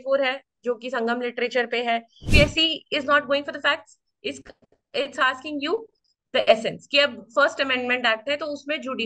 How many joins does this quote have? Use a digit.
1